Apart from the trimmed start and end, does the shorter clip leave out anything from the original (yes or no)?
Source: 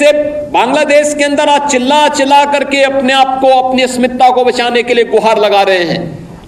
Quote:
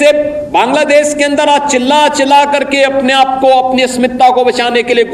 no